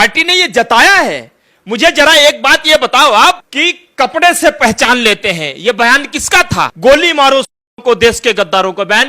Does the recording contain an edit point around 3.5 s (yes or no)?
yes